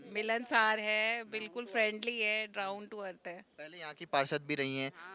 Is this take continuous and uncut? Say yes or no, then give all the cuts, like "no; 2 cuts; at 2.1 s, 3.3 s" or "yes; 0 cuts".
yes; 0 cuts